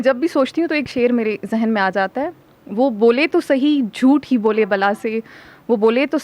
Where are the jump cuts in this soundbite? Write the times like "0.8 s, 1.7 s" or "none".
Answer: 0.9 s